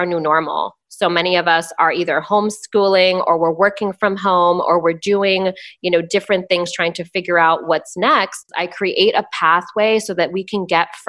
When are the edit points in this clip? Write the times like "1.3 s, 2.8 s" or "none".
8.6 s